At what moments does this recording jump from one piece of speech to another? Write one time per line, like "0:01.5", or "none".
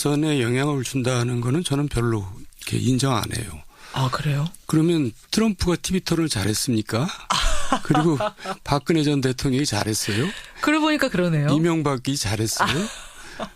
none